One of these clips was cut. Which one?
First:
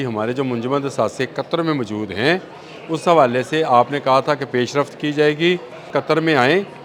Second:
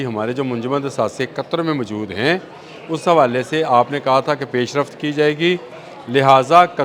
first; 1 cut; at 5.9 s

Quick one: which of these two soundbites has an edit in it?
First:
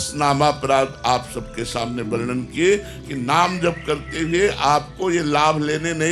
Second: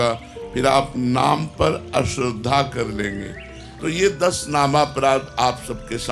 second; 1 cut; at 3.3 s

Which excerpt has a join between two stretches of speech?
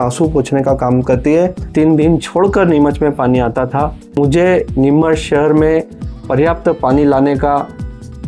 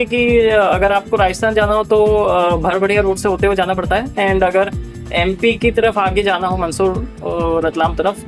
first; 2 cuts; at 1.6 s, 4.2 s

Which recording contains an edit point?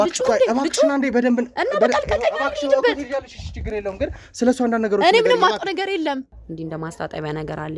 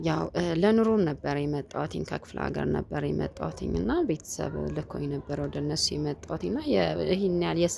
first; 1 cut; at 6.3 s

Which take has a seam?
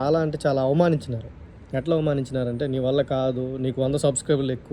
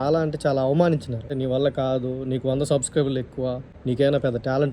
second; 2 cuts; at 1.3 s, 3.7 s

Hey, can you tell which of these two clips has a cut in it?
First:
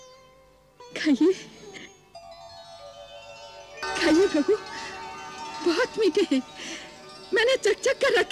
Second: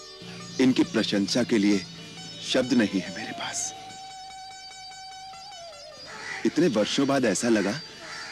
first; 1 cut; at 3.8 s

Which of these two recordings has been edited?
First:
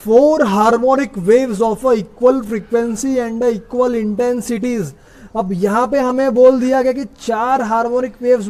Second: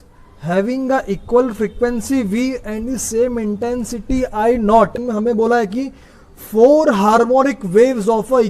second; 1 cut; at 5.0 s

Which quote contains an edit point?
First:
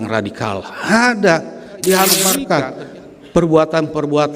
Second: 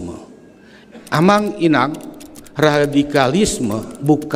first; 1 cut; at 2.2 s

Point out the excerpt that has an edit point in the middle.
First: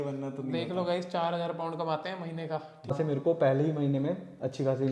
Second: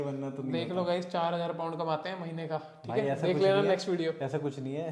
first; 1 cut; at 2.9 s

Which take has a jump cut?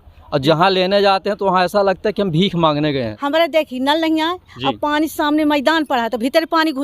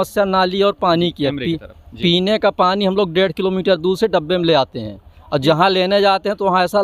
first; 1 cut; at 3.1 s

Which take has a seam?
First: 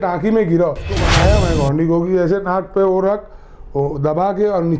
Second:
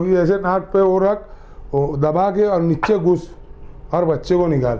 first; 1 cut; at 1.0 s

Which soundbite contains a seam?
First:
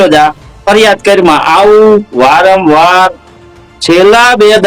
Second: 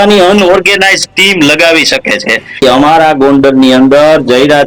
second; 1 cut; at 2.6 s

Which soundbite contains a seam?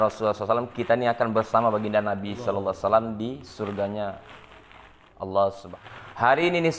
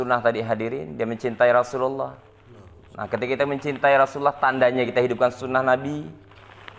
first; 1 cut; at 5.7 s

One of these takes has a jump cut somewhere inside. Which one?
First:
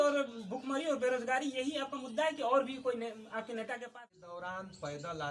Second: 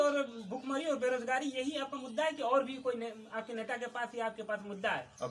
first; 1 cut; at 3.9 s

